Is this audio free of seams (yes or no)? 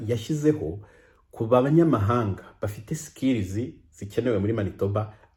yes